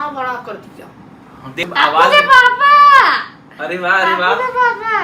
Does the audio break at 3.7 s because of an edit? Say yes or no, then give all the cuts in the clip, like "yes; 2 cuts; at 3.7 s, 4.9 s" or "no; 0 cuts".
no; 1 cut; at 1.6 s